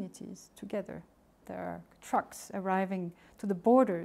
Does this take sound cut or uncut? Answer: cut